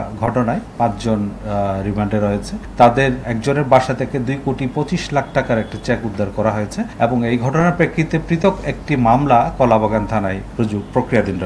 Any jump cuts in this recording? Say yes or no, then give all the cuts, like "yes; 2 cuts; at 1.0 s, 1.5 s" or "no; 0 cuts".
yes; 4 cuts; at 2.6 s, 3.3 s, 6.9 s, 10.4 s